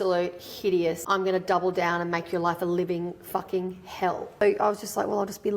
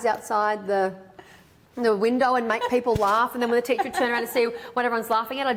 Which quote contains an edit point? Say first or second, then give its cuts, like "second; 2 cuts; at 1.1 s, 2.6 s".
first; 2 cuts; at 1.0 s, 4.4 s